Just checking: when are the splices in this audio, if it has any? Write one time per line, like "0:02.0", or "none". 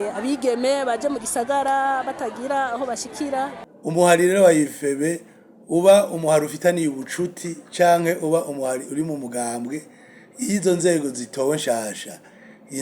0:03.7